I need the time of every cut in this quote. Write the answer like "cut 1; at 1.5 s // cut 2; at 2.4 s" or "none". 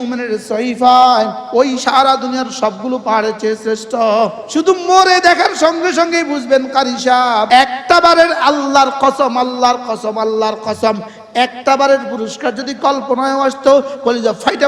cut 1; at 1.4 s // cut 2; at 4.4 s // cut 3; at 7.5 s